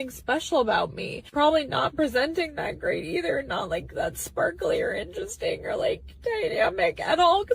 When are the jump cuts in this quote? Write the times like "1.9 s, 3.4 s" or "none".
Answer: 1.6 s, 5.1 s